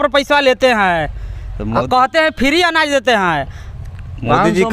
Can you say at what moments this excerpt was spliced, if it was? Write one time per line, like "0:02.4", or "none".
none